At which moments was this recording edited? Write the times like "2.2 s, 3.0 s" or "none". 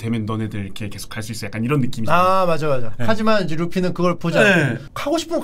none